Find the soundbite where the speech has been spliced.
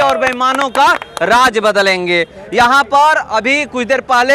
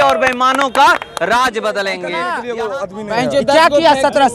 second; 1 cut; at 2.0 s

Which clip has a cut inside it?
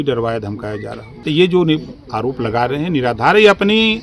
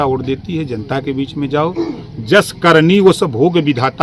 first; 1 cut; at 1.4 s

